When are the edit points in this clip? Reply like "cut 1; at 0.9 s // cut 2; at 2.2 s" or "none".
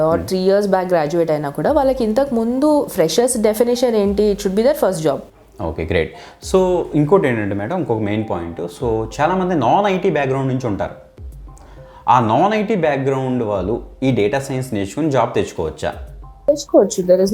cut 1; at 5.2 s